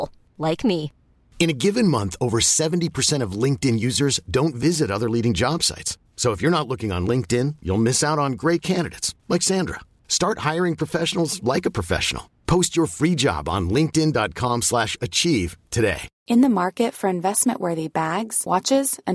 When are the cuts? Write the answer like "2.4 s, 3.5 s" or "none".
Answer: 16.1 s